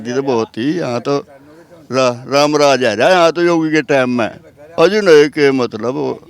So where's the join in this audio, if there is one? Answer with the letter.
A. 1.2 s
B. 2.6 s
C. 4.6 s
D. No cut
C